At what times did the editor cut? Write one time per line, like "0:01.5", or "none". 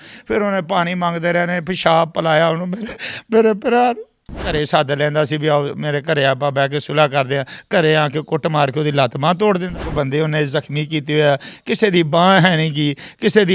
0:04.5
0:09.7